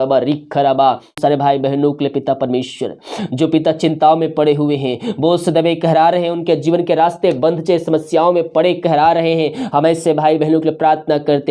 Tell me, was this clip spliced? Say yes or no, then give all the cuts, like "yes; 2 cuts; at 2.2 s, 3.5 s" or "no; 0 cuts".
yes; 1 cut; at 1.2 s